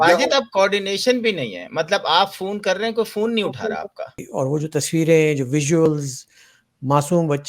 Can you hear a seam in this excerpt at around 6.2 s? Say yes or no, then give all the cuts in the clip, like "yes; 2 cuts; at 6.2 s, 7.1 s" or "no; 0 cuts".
no; 1 cut; at 4.2 s